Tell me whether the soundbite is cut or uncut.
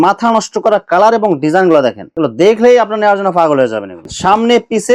uncut